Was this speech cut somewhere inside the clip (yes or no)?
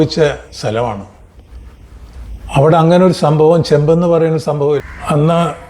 yes